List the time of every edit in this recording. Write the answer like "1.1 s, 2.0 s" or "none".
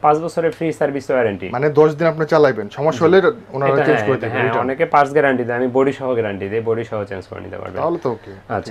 none